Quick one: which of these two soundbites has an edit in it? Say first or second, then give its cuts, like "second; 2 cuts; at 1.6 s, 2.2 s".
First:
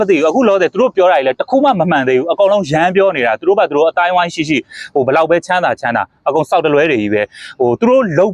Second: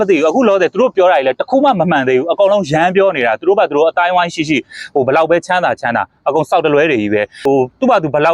second; 1 cut; at 7.3 s